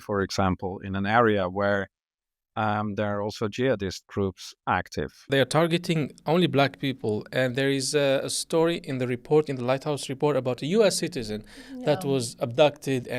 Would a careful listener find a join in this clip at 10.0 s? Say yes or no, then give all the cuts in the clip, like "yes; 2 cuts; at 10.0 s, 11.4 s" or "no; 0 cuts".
no; 1 cut; at 5.2 s